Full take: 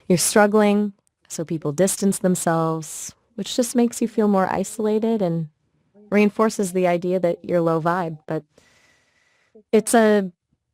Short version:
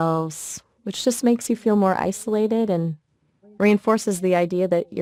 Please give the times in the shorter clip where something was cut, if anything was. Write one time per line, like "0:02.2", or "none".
none

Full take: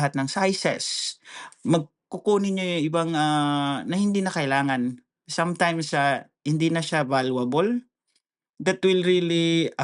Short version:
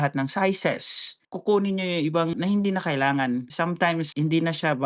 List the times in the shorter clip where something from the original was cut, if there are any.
0:01.2
0:02.3
0:03.9

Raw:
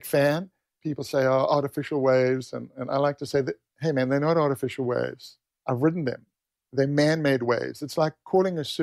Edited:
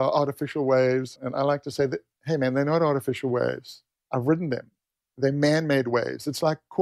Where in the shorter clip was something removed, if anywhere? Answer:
0:01.2

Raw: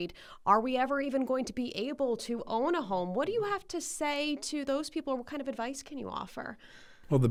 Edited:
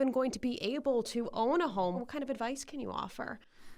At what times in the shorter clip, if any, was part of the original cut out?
0:02.0

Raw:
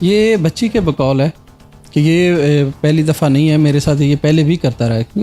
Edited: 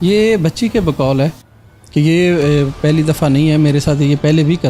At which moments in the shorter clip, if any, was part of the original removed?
none

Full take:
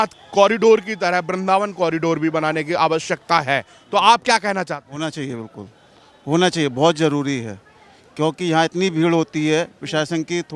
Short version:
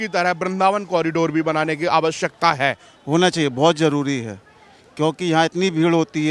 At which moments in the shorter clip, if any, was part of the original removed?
0:02.9

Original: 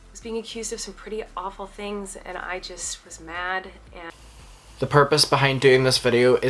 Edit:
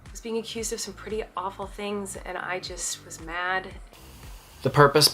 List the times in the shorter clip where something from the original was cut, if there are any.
0:03.9

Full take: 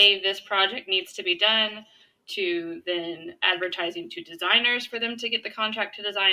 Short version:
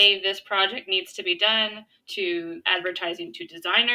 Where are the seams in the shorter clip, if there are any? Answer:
0:02.3

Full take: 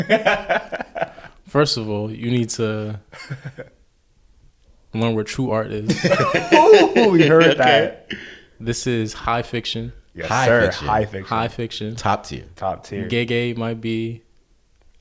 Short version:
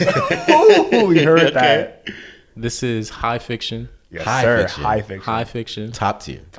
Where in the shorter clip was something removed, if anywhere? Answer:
none

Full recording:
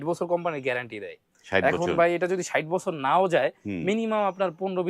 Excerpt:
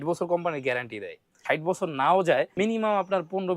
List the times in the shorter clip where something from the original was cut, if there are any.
0:01.4
0:02.5

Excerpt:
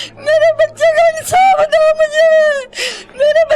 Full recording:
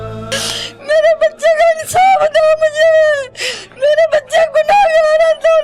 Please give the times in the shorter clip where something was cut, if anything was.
none

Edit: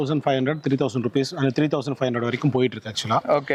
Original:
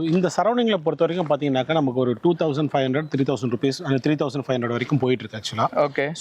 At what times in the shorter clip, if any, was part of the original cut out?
none

